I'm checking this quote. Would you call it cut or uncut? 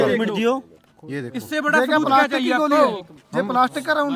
uncut